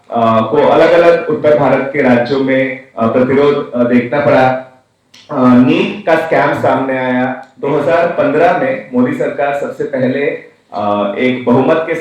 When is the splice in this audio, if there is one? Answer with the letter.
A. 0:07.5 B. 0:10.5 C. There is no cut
A